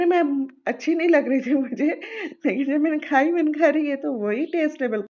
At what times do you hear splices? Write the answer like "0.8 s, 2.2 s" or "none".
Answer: none